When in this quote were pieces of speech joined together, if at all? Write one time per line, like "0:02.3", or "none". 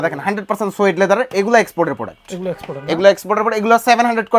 none